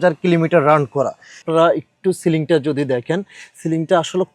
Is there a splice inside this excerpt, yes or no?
yes